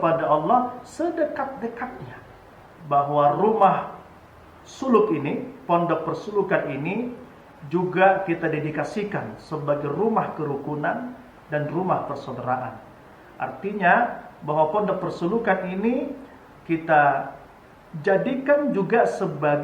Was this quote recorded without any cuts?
no; 1 cut; at 2.5 s

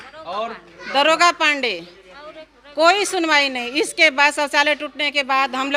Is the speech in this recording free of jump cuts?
yes; 0 cuts

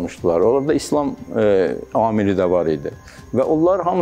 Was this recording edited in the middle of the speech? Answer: no; 0 cuts

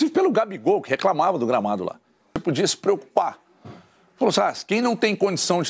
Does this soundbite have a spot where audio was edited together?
yes; 1 cut; at 2.4 s

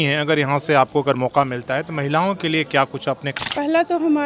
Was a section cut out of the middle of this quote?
yes; 1 cut; at 3.3 s

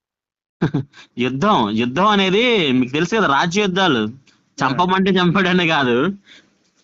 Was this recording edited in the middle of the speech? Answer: no; 0 cuts

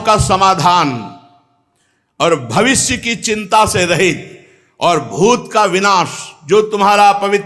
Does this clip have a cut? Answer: no; 0 cuts

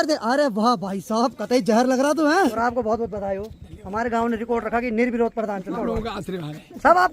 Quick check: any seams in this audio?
yes; 2 cuts; at 2.5 s, 5.8 s

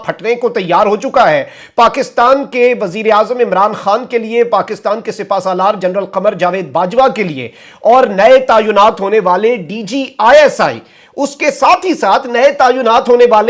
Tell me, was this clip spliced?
no; 0 cuts

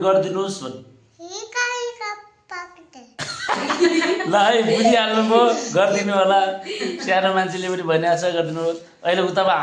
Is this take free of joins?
yes; 0 cuts

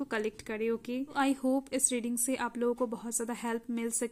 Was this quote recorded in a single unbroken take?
no; 1 cut; at 1.1 s

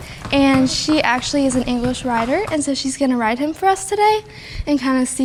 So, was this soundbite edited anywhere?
no; 0 cuts

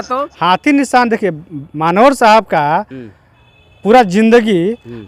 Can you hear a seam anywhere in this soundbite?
no; 0 cuts

